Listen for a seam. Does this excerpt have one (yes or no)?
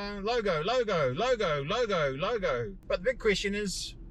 yes